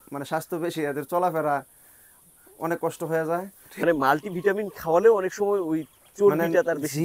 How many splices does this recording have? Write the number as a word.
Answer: one